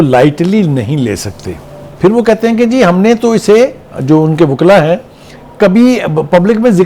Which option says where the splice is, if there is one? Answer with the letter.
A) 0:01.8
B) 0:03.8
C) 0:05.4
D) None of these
A